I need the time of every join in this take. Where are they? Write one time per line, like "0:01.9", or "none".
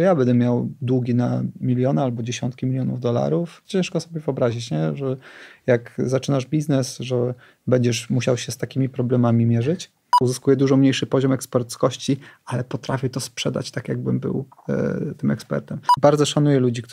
0:03.6
0:10.2
0:15.8